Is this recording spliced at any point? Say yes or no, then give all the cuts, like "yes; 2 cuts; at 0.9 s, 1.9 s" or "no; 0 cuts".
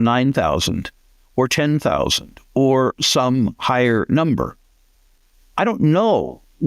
no; 0 cuts